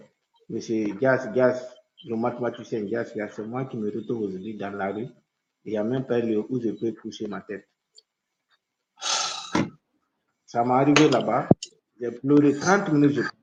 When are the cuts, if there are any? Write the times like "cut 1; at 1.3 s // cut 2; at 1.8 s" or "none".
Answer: none